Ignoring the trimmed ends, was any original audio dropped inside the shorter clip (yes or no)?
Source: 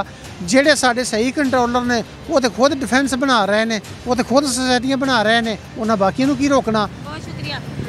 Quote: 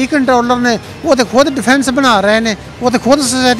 no